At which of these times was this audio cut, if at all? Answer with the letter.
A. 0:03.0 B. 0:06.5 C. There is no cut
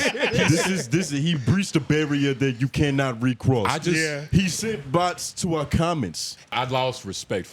B